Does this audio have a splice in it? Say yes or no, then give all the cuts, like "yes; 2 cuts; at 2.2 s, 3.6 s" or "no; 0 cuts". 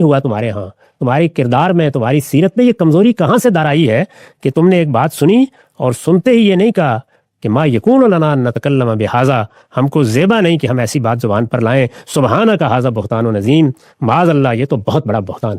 no; 0 cuts